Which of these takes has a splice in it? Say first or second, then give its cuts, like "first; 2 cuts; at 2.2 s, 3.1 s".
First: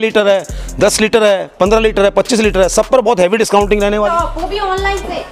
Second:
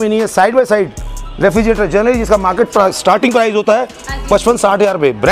first; 1 cut; at 4.1 s